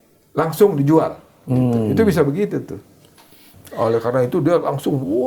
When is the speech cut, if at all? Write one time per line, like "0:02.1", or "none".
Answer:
0:03.5